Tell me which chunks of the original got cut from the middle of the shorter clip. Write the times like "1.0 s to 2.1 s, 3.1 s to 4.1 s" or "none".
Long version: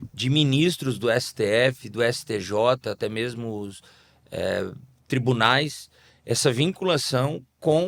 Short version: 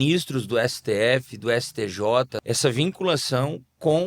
2.9 s to 6.2 s